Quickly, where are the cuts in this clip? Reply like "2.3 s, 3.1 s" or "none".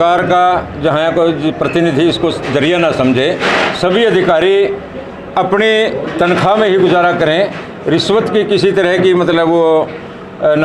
none